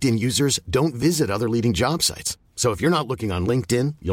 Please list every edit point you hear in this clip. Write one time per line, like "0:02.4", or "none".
none